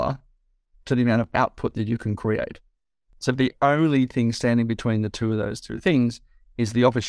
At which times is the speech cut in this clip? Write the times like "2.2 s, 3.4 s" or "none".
3.0 s